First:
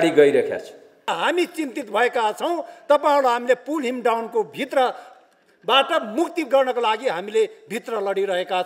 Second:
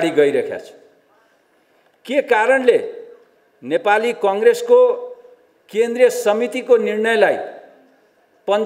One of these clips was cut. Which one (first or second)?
first